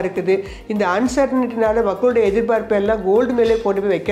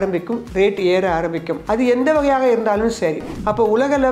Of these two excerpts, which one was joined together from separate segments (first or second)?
second